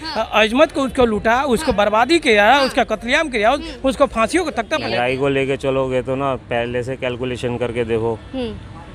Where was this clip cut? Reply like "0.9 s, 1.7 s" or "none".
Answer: 4.8 s